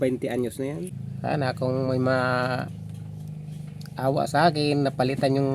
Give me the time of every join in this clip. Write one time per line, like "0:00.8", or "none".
0:01.0